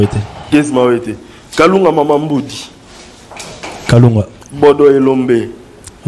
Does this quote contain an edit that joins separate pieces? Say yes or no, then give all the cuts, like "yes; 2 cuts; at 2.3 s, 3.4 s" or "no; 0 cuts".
no; 0 cuts